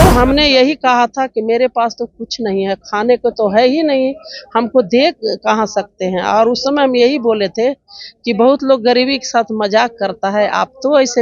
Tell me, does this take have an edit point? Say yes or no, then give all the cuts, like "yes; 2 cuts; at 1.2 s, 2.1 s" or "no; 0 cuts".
no; 0 cuts